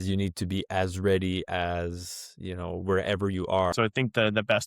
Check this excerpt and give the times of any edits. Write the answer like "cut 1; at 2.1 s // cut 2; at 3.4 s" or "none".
cut 1; at 3.7 s